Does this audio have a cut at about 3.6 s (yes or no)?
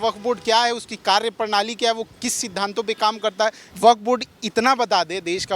yes